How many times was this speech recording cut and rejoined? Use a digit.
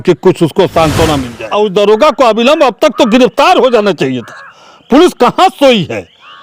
1